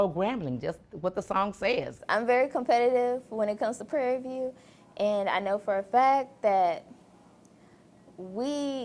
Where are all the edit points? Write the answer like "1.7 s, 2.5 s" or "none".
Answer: 2.0 s